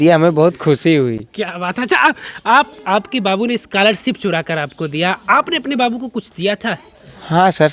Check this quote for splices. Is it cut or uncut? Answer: uncut